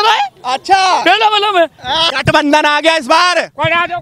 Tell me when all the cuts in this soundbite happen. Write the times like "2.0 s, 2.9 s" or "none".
2.1 s